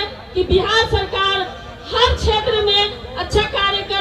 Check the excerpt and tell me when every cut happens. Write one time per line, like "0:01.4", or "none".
none